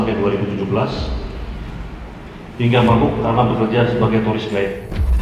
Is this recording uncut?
yes; 0 cuts

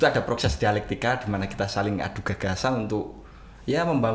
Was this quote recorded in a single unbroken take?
yes; 0 cuts

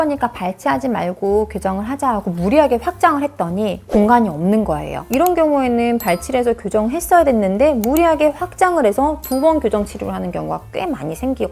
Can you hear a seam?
yes; 1 cut; at 5.0 s

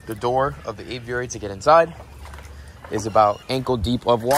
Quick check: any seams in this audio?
yes; 1 cut; at 3.4 s

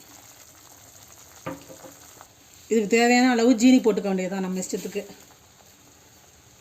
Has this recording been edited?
yes; 1 cut; at 2.7 s

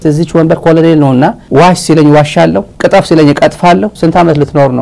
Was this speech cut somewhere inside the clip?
yes; 1 cut; at 3.9 s

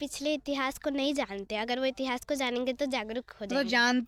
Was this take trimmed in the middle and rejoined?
no; 0 cuts

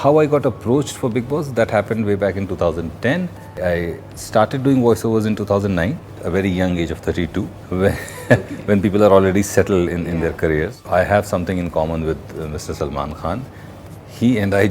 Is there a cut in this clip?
yes; 4 cuts; at 3.6 s, 6.2 s, 7.6 s, 10.8 s

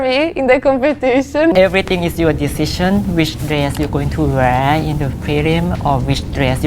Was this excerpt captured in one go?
no; 1 cut; at 1.5 s

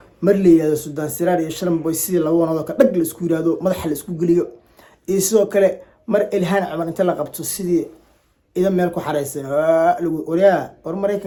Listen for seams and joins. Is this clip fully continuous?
yes; 0 cuts

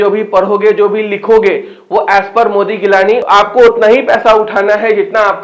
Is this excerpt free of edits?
no; 1 cut; at 3.2 s

